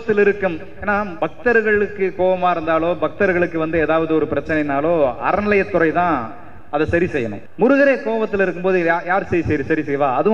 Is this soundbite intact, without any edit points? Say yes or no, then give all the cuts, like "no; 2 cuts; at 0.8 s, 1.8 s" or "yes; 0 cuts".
no; 2 cuts; at 1.1 s, 7.4 s